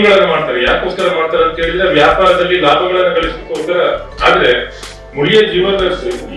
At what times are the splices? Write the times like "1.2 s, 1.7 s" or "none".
4.1 s